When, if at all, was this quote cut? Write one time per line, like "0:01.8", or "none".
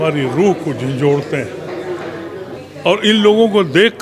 0:02.5